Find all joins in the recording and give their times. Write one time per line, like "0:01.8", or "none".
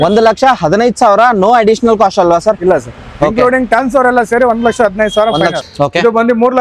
0:05.5